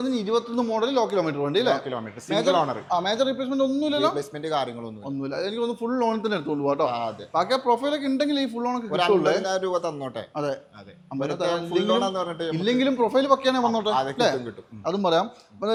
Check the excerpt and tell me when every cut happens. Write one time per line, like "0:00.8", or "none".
none